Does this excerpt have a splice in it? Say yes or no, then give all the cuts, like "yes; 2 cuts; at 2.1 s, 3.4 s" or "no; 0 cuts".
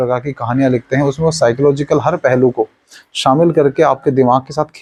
no; 0 cuts